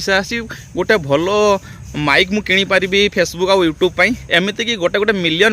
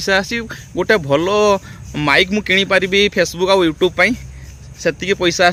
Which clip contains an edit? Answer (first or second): first